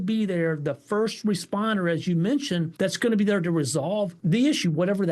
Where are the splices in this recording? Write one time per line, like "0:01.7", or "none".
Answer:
0:02.7
0:04.2